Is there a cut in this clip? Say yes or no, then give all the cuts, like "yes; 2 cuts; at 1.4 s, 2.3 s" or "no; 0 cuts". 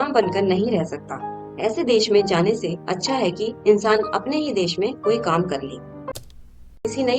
yes; 1 cut; at 6.2 s